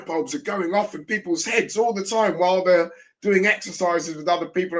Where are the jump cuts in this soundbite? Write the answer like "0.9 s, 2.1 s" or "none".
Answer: none